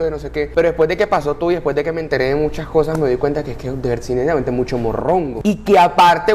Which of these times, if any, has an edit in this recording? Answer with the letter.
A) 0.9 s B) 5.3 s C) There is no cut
B